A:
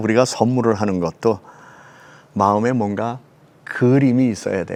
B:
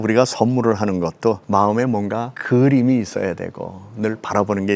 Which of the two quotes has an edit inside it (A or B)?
B